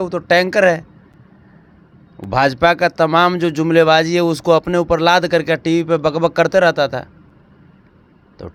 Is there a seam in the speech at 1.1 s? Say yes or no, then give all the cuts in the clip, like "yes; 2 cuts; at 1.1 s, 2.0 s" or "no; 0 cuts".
no; 0 cuts